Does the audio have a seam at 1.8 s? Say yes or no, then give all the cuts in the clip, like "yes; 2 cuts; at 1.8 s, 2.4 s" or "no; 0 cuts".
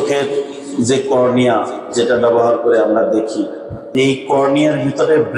no; 1 cut; at 3.9 s